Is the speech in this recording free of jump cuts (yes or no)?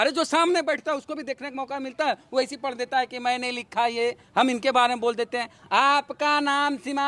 yes